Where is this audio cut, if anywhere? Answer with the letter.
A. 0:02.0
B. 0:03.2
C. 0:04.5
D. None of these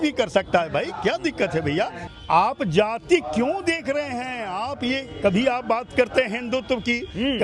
A